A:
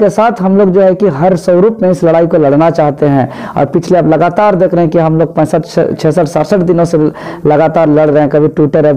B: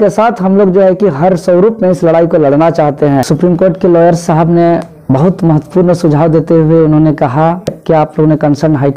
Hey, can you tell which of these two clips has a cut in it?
B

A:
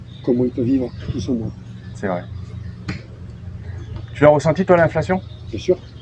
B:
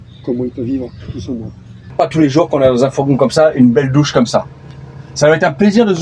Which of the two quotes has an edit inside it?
B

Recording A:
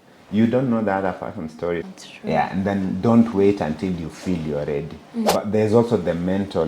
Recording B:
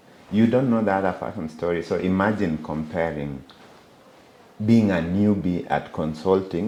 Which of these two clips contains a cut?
A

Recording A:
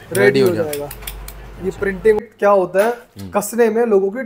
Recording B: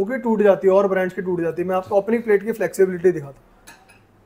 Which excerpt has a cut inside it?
A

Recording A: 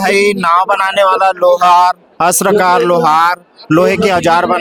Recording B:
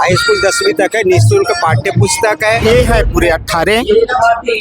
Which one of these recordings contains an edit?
B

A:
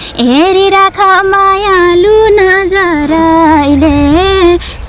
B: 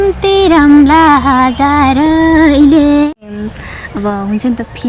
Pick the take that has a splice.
B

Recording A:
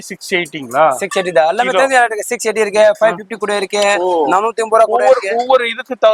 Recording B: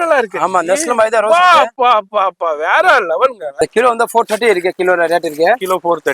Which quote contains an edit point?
B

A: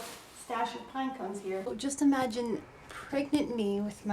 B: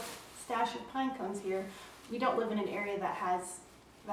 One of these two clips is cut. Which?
A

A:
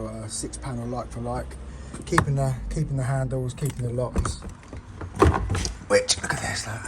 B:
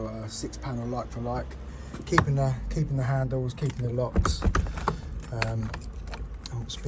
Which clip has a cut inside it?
A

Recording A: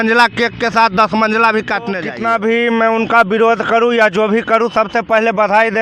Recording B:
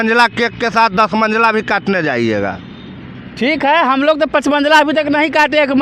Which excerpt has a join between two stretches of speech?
A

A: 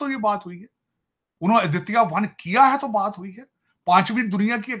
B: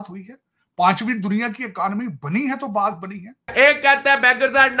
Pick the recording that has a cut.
B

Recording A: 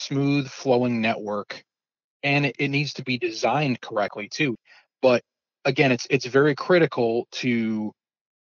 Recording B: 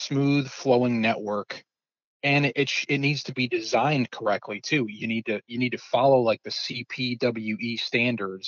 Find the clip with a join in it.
A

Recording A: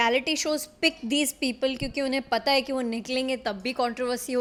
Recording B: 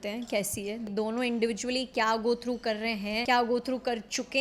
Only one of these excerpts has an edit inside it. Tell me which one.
B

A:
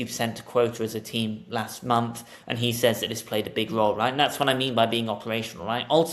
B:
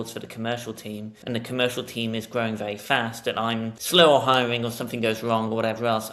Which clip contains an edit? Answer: B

